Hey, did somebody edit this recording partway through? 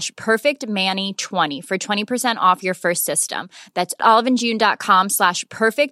yes; 1 cut; at 1.5 s

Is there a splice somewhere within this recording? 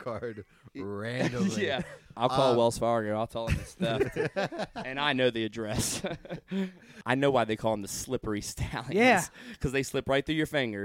yes; 2 cuts; at 2.0 s, 7.0 s

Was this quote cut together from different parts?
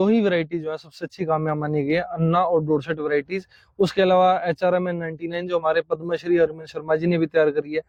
no; 0 cuts

